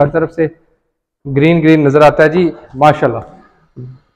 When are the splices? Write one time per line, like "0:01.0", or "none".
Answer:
0:02.6